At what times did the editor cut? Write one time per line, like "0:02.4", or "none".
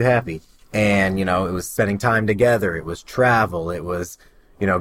0:01.6